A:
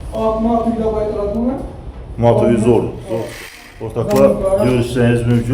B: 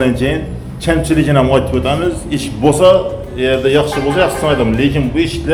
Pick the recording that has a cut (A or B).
A